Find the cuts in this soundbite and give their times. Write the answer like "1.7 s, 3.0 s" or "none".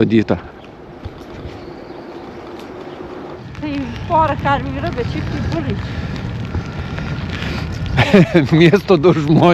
3.4 s